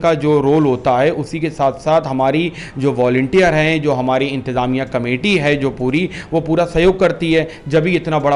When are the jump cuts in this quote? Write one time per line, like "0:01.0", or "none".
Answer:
none